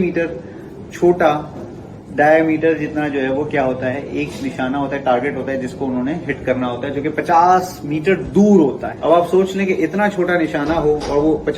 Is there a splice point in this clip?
yes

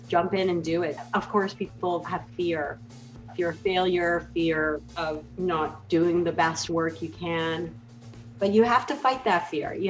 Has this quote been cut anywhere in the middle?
yes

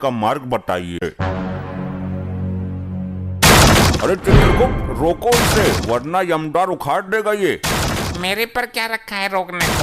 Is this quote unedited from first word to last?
no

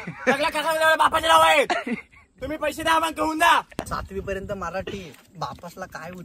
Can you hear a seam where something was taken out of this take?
yes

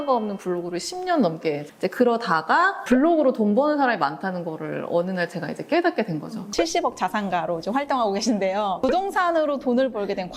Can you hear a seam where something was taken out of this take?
yes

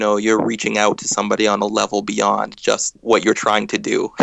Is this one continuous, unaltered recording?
no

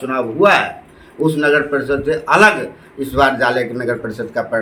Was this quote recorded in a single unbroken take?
yes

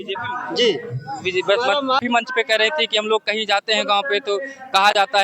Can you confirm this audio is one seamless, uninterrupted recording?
no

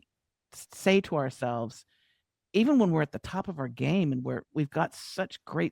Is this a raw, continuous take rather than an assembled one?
yes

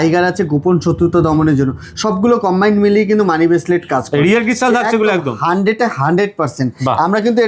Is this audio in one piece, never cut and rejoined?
yes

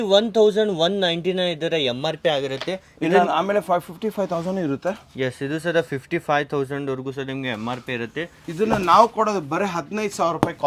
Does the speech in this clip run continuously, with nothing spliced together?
yes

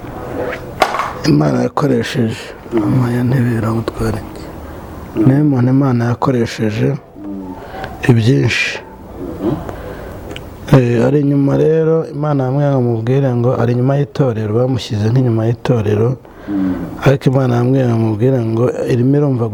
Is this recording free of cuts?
yes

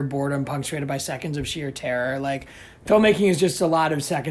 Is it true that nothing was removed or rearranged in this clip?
yes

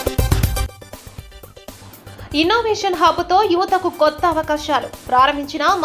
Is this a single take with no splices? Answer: no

